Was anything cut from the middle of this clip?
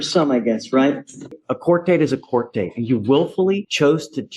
yes; 1 cut; at 1.3 s

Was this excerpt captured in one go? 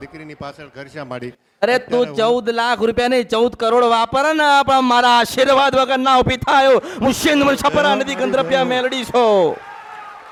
yes; 0 cuts

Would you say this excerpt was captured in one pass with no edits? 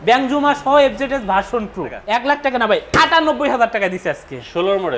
no; 1 cut; at 2.0 s

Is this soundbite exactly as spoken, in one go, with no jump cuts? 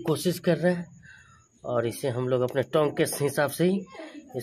yes; 0 cuts

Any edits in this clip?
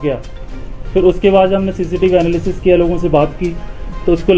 no; 0 cuts

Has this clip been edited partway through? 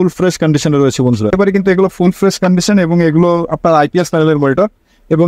yes; 1 cut; at 1.3 s

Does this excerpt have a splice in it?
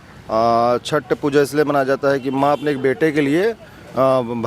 no; 0 cuts

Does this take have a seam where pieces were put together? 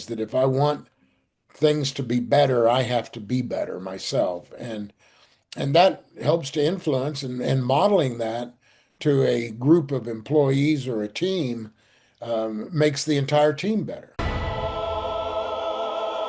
yes; 1 cut; at 14.1 s

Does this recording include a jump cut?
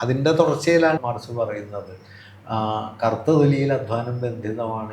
yes; 1 cut; at 1.0 s

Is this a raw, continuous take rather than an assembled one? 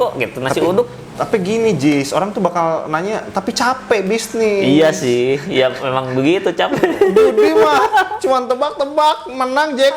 yes; 0 cuts

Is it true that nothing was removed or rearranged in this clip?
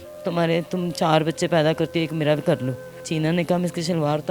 no; 1 cut; at 3.1 s

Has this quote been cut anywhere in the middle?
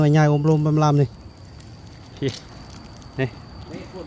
yes; 1 cut; at 2.5 s

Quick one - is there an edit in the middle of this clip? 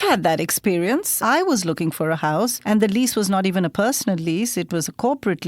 yes; 2 cuts; at 1.1 s, 2.6 s

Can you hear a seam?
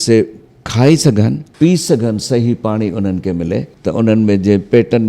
yes; 2 cuts; at 1.4 s, 3.7 s

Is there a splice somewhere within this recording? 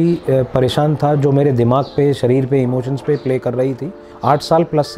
no; 0 cuts

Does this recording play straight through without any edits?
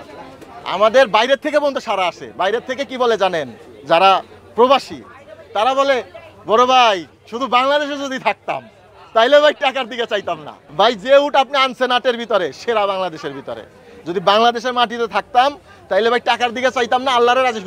yes; 0 cuts

